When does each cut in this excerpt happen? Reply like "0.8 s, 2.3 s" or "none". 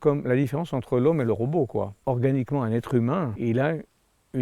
2.0 s, 3.3 s